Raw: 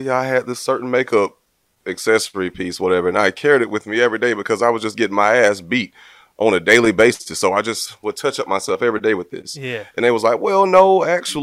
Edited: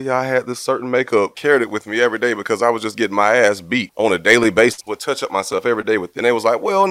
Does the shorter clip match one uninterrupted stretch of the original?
no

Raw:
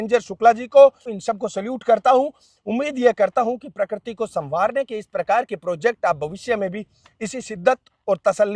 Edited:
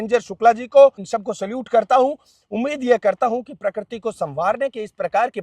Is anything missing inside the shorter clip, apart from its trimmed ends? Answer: yes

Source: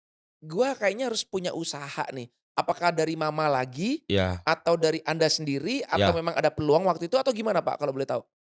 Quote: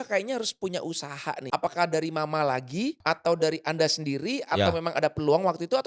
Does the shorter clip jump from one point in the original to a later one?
yes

